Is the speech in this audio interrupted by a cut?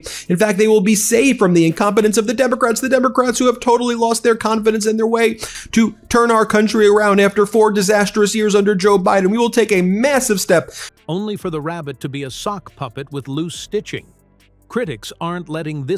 no; 0 cuts

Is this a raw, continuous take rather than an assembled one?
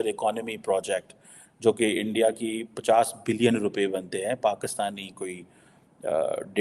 yes; 0 cuts

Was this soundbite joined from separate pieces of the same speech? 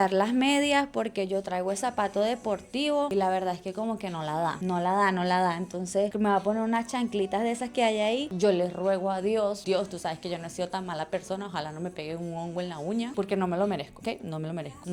no; 0 cuts

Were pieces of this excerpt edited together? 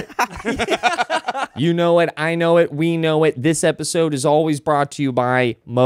yes; 1 cut; at 1.5 s

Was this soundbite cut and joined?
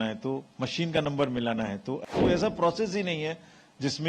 yes; 1 cut; at 2.0 s

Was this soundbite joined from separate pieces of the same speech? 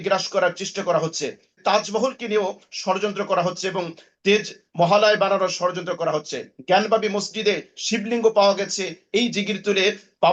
yes; 1 cut; at 1.5 s

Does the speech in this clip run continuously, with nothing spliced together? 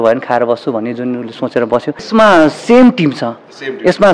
no; 1 cut; at 2.0 s

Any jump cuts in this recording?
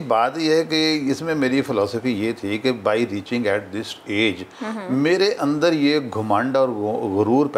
no; 0 cuts

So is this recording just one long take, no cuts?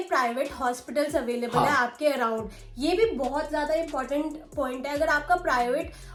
yes; 0 cuts

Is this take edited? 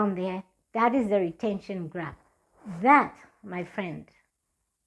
no; 0 cuts

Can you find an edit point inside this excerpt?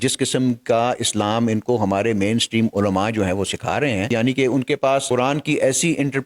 yes; 1 cut; at 4.1 s

